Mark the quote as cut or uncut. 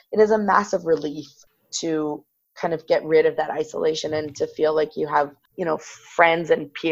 cut